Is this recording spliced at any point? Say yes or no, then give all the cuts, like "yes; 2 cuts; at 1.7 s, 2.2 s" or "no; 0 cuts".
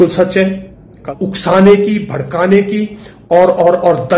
yes; 1 cut; at 1.0 s